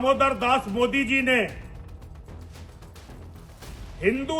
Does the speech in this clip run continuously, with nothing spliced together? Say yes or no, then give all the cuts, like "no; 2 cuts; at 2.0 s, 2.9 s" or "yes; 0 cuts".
yes; 0 cuts